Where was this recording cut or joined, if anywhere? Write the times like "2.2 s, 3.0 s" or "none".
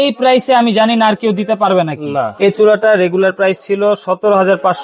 2.3 s